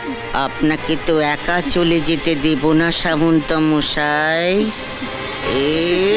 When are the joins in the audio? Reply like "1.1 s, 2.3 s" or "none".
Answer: none